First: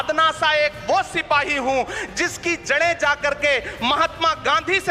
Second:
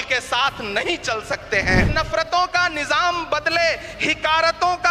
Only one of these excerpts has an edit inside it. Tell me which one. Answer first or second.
second